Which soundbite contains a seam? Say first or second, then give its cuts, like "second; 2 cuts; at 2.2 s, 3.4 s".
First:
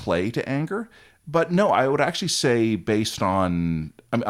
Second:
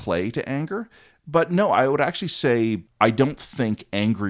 second; 1 cut; at 2.8 s